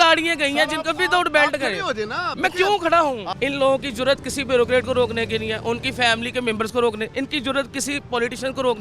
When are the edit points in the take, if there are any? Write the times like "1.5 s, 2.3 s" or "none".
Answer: 3.3 s